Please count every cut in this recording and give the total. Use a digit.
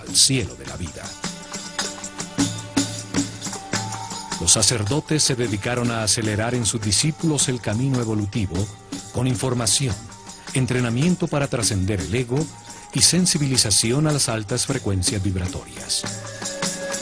1